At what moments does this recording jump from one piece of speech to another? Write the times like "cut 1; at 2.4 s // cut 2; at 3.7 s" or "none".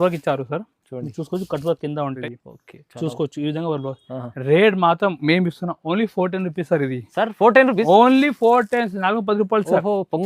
cut 1; at 2.1 s